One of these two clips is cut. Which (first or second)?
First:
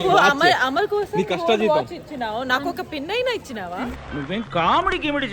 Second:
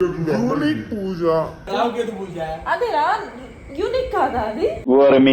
second